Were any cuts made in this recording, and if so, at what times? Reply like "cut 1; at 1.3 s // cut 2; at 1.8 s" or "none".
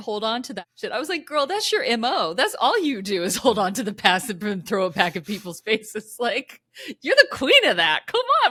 none